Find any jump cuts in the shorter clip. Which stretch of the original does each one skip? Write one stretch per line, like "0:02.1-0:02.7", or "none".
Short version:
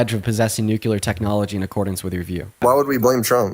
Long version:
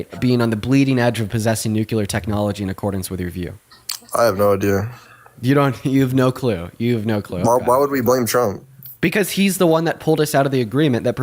0:03.7-0:07.6

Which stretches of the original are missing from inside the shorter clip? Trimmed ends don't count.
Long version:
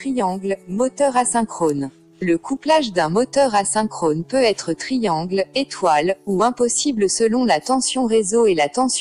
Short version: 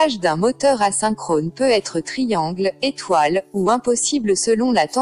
none

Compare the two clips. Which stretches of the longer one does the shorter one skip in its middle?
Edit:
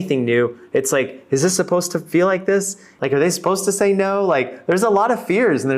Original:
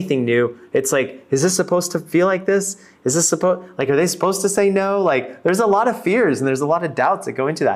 0:02.9-0:03.7

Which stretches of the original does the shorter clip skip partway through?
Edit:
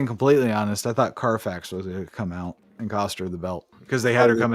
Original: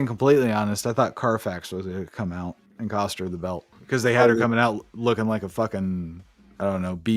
none

